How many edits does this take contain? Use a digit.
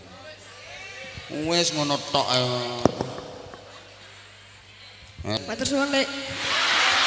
1